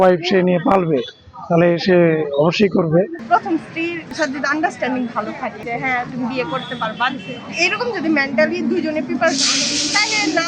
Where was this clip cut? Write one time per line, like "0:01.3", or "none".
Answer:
0:03.2
0:04.1
0:05.6